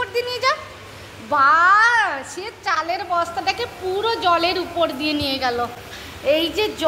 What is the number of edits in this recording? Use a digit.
0